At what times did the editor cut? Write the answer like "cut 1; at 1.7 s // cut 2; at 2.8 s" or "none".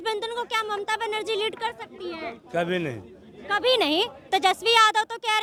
none